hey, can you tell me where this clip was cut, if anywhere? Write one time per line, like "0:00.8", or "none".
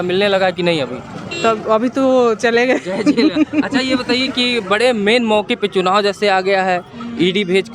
none